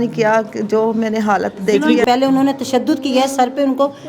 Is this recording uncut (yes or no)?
no